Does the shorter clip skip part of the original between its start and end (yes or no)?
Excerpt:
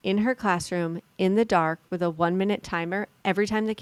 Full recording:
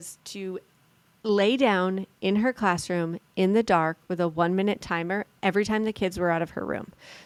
no